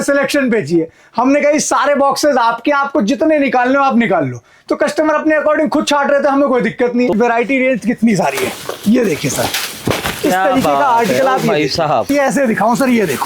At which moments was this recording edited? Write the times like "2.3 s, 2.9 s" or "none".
7.1 s, 12.1 s